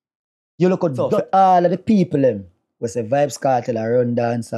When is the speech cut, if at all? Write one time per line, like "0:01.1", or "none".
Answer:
0:01.0